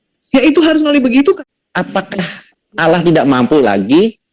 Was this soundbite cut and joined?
yes; 1 cut; at 1.4 s

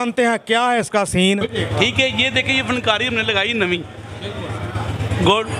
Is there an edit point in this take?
yes; 1 cut; at 1.5 s

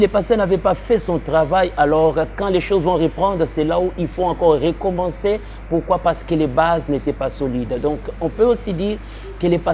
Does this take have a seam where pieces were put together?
no; 0 cuts

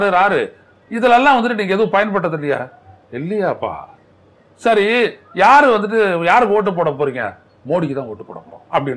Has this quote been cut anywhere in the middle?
no; 0 cuts

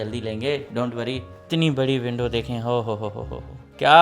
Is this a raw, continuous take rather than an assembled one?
no; 1 cut; at 1.3 s

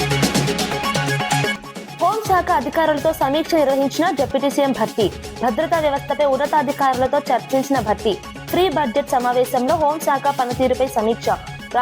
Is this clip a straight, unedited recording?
no; 1 cut; at 1.5 s

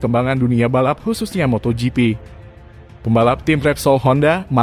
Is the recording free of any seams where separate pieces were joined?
no; 1 cut; at 2.9 s

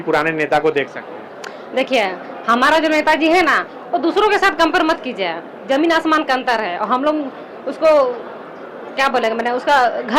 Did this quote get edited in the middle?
no; 0 cuts

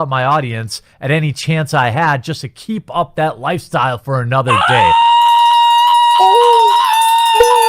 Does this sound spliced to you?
no; 0 cuts

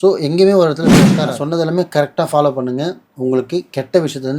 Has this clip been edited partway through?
yes; 1 cut; at 1.3 s

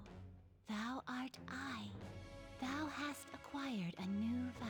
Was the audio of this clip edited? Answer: no; 0 cuts

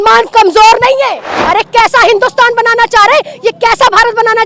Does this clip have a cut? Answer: yes; 1 cut; at 1.4 s

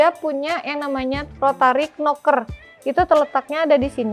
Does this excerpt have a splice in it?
no; 0 cuts

